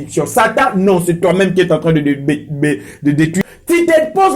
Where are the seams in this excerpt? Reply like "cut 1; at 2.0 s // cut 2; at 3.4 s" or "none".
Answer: cut 1; at 3.4 s